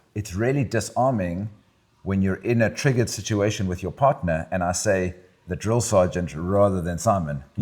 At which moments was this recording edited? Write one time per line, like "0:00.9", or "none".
none